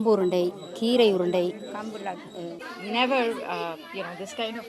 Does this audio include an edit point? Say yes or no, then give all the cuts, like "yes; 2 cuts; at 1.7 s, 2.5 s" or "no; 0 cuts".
yes; 1 cut; at 2.7 s